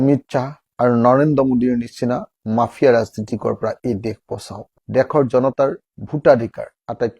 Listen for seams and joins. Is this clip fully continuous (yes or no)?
no